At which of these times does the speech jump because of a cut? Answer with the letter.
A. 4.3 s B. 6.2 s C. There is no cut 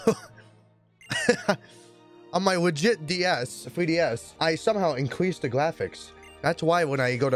A